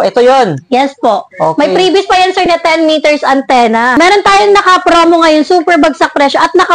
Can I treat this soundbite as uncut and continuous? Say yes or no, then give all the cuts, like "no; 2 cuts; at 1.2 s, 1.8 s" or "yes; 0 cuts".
no; 1 cut; at 4.0 s